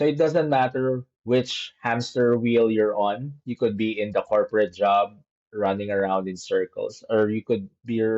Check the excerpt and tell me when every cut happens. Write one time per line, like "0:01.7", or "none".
0:01.1